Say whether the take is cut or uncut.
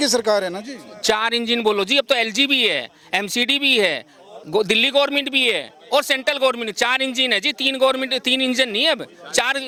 uncut